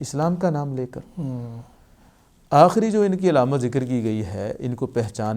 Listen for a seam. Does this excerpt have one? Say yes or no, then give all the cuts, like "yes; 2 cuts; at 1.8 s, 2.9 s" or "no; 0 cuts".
no; 0 cuts